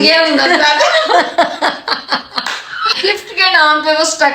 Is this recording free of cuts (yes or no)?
no